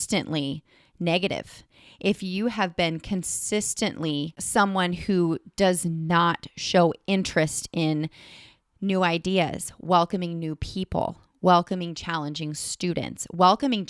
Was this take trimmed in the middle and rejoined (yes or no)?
yes